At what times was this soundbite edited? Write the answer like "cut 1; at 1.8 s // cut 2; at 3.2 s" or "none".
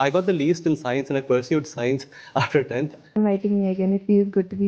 cut 1; at 3.2 s